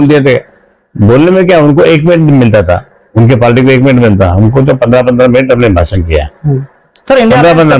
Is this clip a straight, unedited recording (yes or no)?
yes